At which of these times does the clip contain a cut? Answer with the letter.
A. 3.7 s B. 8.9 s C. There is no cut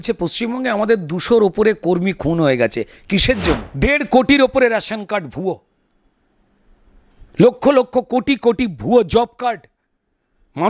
A